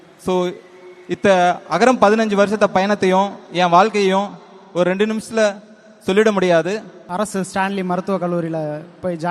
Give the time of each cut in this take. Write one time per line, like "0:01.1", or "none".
0:07.0